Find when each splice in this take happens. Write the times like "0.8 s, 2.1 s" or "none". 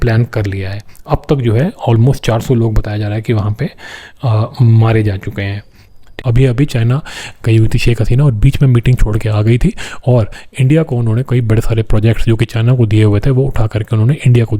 6.1 s